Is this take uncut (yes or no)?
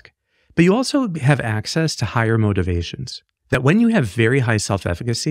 no